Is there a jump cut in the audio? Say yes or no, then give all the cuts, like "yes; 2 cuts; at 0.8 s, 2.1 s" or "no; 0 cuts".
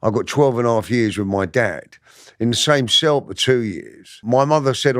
yes; 1 cut; at 4.1 s